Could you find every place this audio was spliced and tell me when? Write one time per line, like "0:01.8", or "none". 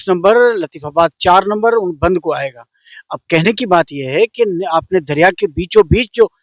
none